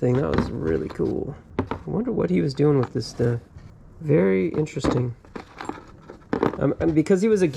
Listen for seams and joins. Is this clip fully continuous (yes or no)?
yes